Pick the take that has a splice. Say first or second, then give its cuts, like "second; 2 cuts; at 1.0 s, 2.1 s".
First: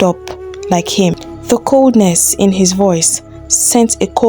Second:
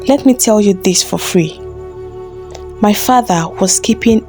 first; 1 cut; at 1.3 s